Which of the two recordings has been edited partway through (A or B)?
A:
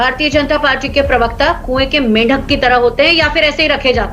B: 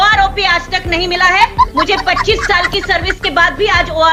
A